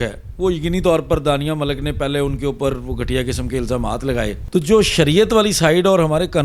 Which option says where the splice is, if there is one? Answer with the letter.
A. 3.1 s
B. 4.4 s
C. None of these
B